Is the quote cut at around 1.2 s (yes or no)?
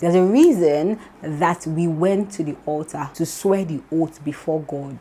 no